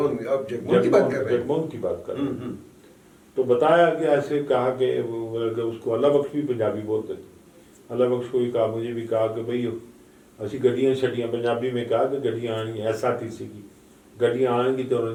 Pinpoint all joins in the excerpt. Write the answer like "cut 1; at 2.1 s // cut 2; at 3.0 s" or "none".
none

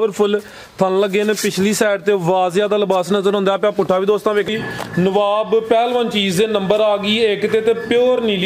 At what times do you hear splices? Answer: cut 1; at 4.5 s

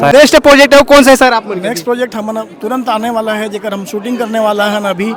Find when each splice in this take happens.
none

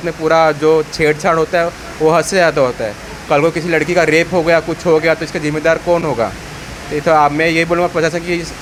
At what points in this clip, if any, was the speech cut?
none

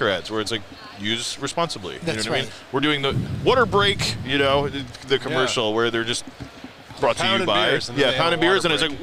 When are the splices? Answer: none

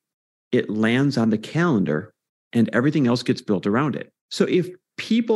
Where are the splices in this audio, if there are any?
cut 1; at 4.1 s

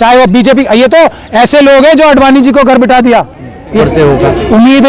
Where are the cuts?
cut 1; at 3.8 s

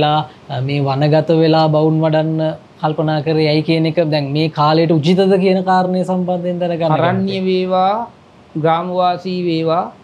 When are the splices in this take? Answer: none

